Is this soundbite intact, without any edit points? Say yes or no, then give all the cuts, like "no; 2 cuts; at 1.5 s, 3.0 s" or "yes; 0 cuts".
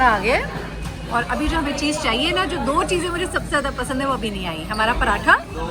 yes; 0 cuts